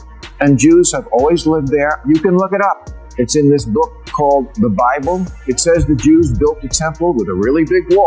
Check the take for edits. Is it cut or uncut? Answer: uncut